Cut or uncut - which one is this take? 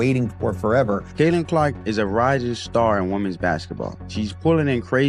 cut